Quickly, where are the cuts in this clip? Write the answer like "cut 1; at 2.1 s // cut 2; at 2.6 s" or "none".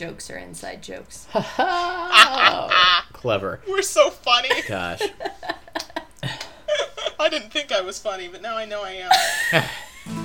cut 1; at 7.1 s